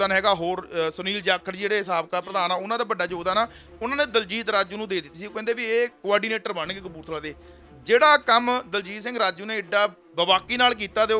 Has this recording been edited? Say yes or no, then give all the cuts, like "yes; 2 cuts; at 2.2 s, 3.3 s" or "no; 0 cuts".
no; 0 cuts